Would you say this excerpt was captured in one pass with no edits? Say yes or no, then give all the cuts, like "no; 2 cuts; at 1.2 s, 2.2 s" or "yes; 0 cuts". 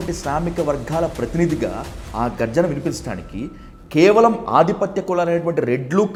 yes; 0 cuts